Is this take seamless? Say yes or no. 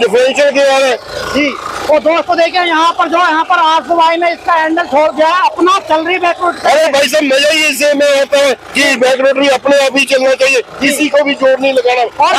yes